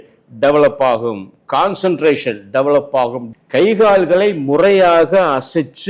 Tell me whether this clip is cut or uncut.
cut